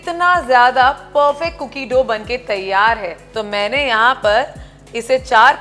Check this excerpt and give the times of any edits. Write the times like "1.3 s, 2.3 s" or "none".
3.2 s